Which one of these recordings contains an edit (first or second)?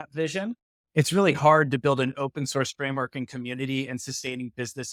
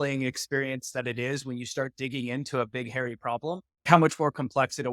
second